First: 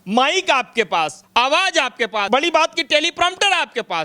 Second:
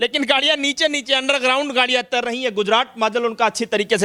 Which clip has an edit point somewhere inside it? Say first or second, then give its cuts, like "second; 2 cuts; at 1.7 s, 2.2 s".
first; 2 cuts; at 1.2 s, 2.3 s